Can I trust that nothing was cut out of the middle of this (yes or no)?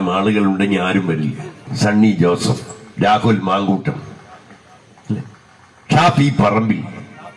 no